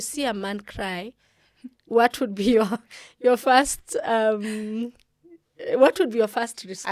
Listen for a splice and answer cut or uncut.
uncut